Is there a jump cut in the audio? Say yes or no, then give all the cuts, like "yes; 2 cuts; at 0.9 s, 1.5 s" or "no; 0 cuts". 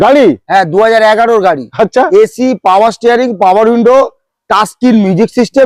no; 0 cuts